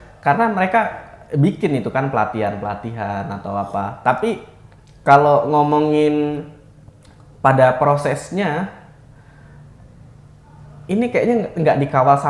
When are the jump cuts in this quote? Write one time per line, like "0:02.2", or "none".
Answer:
none